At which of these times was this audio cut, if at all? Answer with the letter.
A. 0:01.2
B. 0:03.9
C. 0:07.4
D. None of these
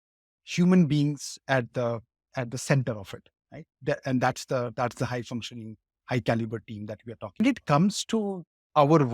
C